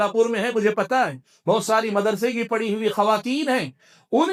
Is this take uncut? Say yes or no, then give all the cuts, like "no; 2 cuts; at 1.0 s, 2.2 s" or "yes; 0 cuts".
yes; 0 cuts